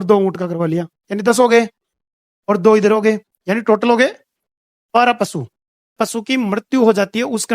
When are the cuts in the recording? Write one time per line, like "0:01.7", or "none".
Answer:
0:05.9